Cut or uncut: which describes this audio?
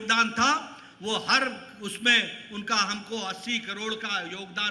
uncut